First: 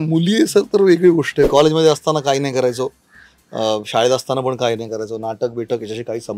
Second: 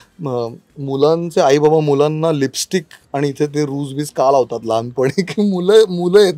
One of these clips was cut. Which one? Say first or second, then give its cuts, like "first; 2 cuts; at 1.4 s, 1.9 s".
first; 1 cut; at 1.5 s